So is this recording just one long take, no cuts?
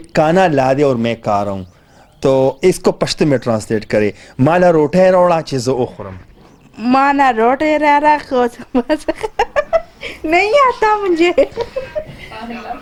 yes; 0 cuts

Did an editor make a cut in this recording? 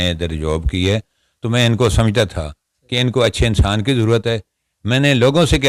no; 0 cuts

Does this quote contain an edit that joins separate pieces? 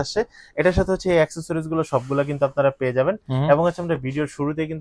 no; 0 cuts

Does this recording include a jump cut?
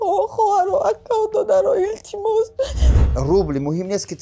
yes; 1 cut; at 2.9 s

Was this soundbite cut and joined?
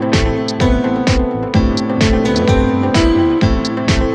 no; 0 cuts

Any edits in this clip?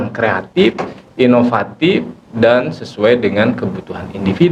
no; 0 cuts

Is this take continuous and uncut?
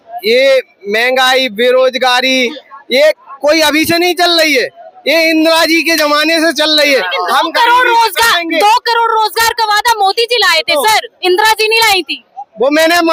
yes; 0 cuts

